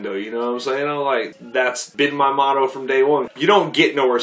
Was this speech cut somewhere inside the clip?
yes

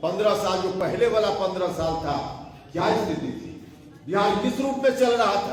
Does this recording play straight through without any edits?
yes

